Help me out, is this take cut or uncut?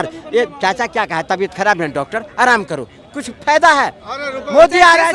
uncut